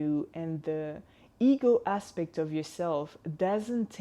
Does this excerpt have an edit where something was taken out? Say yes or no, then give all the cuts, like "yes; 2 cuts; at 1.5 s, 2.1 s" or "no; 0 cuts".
no; 0 cuts